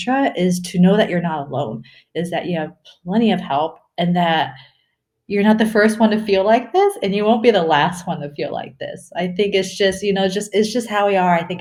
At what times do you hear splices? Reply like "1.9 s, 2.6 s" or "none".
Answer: none